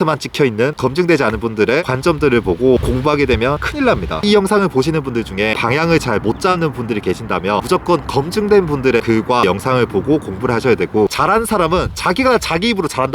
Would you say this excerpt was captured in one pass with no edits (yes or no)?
no